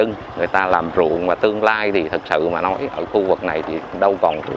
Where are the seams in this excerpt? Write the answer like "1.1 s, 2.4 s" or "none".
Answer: none